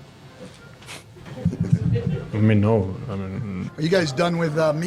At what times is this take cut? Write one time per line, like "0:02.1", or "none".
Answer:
0:01.3
0:03.6